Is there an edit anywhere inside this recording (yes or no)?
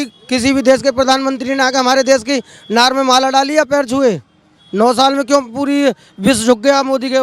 no